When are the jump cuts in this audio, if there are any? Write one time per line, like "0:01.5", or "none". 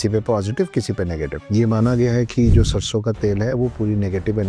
0:01.4